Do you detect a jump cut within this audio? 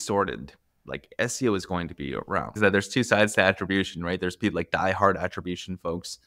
yes; 1 cut; at 2.5 s

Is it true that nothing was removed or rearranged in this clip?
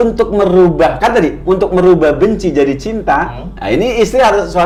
yes; 0 cuts

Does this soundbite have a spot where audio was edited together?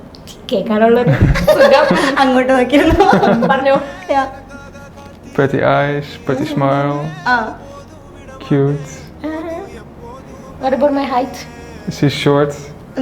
no; 0 cuts

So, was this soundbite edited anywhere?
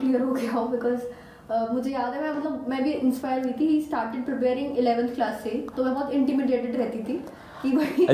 no; 0 cuts

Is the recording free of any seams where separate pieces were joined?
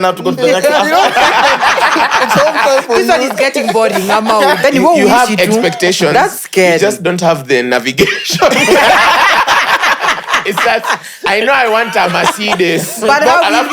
no; 1 cut; at 4.6 s

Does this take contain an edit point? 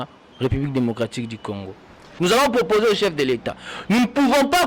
yes; 1 cut; at 2.0 s

